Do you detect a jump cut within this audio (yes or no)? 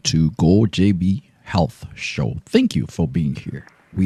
no